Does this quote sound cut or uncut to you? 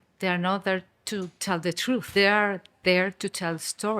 cut